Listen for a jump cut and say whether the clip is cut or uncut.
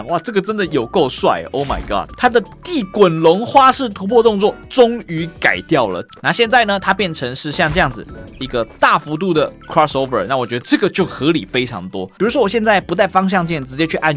cut